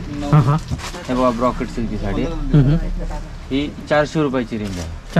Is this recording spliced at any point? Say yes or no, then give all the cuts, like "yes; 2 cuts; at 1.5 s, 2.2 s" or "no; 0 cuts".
no; 0 cuts